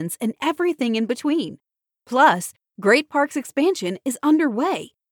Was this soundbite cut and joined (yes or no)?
no